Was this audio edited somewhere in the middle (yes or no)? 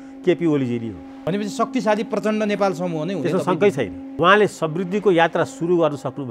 yes